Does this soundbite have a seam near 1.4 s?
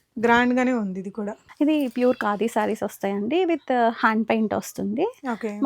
yes; 1 cut; at 1.4 s

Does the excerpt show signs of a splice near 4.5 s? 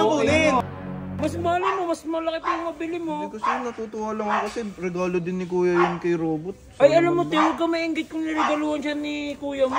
no; 1 cut; at 1.1 s

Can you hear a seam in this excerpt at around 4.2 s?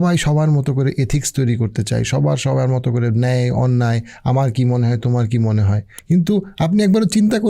no; 1 cut; at 5.9 s

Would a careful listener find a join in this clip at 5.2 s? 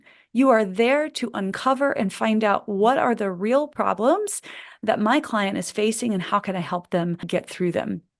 no; 1 cut; at 7.2 s

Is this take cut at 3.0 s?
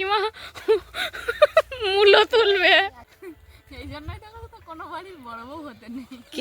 yes; 1 cut; at 3.0 s

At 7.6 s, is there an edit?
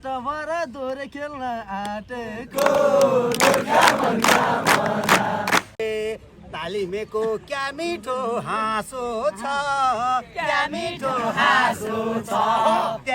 no; 1 cut; at 5.7 s

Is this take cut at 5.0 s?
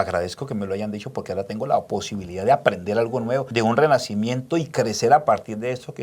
no; 1 cut; at 3.5 s

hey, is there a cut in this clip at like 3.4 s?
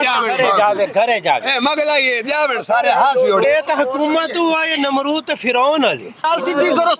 yes; 2 cuts; at 3.4 s, 6.2 s

